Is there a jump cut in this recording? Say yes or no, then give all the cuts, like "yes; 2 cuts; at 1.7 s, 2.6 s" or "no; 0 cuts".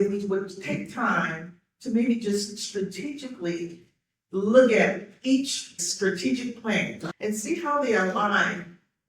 yes; 2 cuts; at 5.9 s, 7.0 s